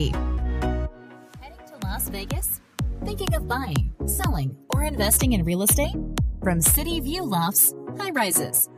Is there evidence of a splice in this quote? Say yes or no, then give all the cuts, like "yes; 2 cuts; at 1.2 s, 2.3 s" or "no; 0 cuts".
yes; 1 cut; at 1.7 s